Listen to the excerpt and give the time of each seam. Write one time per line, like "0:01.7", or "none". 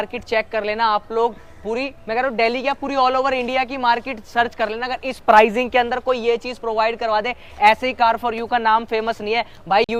none